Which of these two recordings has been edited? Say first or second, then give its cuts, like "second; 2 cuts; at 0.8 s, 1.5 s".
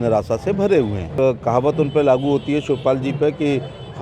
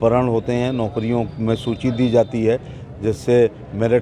first; 1 cut; at 1.2 s